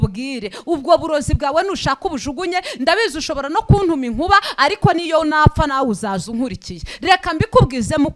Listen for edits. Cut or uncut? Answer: uncut